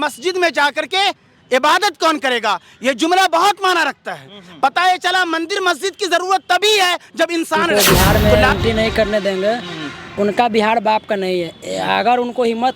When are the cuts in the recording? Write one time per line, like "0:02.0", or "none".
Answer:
0:07.6